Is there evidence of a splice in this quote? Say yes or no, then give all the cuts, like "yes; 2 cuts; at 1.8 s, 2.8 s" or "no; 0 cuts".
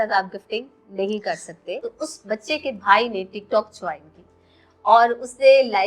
yes; 1 cut; at 1.8 s